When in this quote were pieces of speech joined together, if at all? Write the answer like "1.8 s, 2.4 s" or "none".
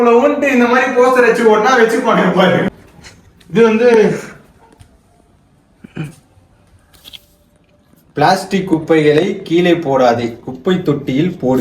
2.7 s